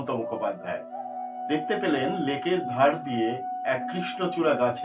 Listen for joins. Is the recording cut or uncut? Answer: uncut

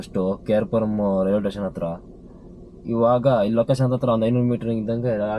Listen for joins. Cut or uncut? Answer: uncut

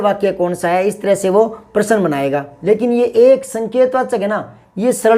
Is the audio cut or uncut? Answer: cut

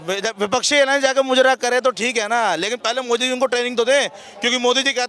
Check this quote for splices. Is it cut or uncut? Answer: uncut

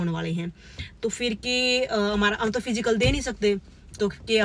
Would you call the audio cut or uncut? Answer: uncut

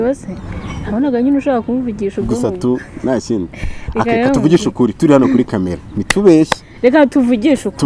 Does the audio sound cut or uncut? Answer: uncut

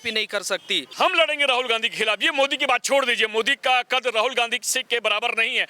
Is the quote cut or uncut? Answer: cut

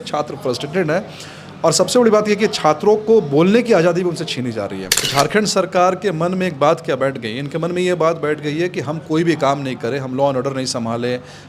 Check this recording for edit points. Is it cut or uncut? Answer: cut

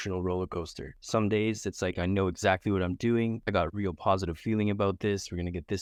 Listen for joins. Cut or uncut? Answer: uncut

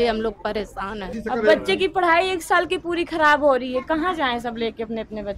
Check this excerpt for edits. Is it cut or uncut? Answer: cut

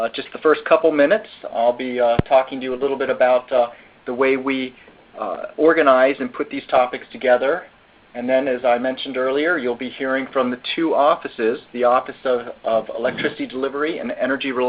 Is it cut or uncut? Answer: cut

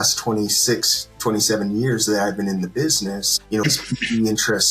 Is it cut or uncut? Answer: cut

